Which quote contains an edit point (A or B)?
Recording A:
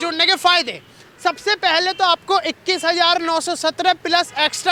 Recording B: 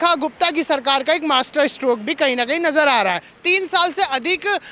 B